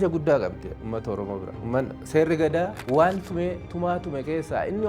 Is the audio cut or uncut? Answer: cut